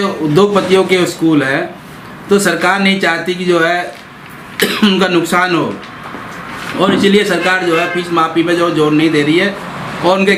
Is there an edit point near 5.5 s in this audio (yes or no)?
no